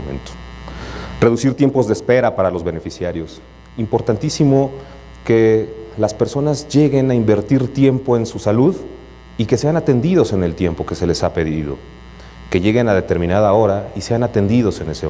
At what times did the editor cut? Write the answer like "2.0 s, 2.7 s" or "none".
none